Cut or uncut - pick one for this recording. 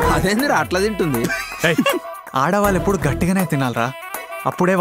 uncut